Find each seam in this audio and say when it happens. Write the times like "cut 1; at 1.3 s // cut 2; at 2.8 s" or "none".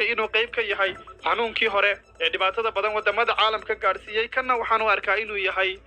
cut 1; at 1.1 s // cut 2; at 2.1 s